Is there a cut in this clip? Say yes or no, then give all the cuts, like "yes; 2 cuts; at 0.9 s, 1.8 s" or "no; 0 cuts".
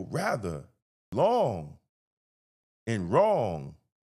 yes; 1 cut; at 1.1 s